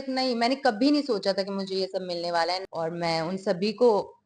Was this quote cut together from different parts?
yes; 1 cut; at 2.6 s

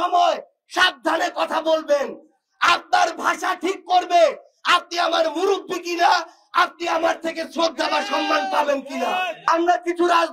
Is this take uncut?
no; 1 cut; at 9.4 s

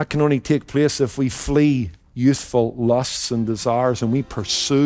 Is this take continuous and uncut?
yes; 0 cuts

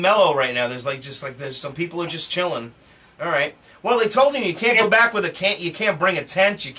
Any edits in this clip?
yes; 1 cut; at 3.5 s

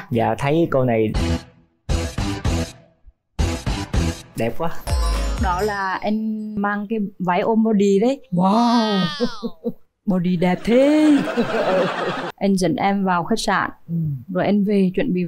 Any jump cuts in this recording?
yes; 3 cuts; at 4.9 s, 6.6 s, 12.2 s

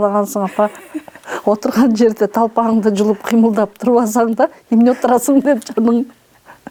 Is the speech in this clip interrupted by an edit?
no; 0 cuts

